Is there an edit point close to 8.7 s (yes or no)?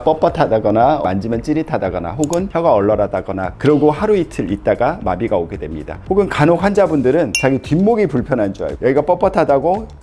yes